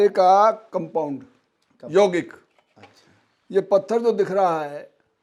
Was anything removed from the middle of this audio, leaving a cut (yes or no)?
no